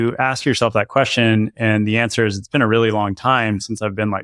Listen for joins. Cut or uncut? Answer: uncut